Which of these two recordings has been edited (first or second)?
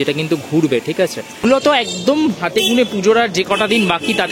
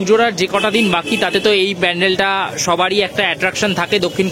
first